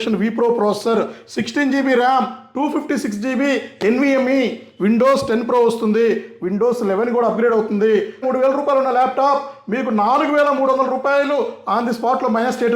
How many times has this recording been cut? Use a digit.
1